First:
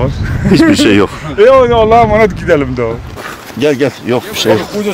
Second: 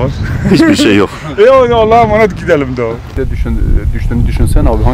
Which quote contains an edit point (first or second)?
second